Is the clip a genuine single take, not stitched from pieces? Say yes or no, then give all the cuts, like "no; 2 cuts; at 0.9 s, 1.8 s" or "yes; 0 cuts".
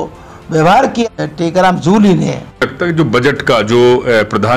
no; 2 cuts; at 1.0 s, 2.6 s